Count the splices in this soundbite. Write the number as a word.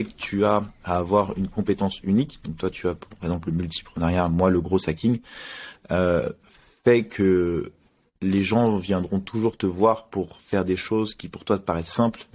zero